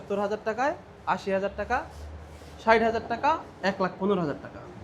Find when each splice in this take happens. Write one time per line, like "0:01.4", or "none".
none